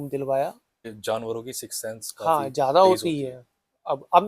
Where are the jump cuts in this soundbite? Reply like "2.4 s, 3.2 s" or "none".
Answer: 0.9 s